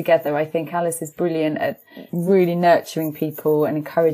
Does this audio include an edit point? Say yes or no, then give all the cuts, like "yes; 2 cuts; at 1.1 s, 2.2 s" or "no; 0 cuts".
yes; 1 cut; at 1.9 s